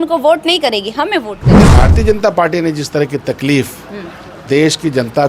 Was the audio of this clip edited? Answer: yes; 1 cut; at 1.6 s

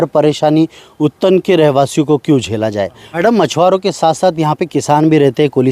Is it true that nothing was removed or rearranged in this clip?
no; 1 cut; at 3.0 s

